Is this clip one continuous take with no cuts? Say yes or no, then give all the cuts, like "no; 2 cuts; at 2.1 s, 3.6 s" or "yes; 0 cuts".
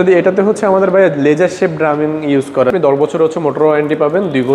no; 1 cut; at 2.7 s